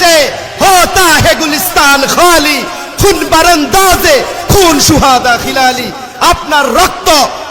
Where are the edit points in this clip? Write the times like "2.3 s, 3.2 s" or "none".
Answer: none